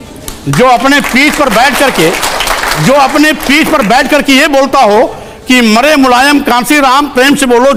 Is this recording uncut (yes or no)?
yes